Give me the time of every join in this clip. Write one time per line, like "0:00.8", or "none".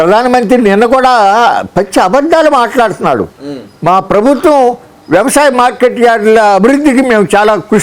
none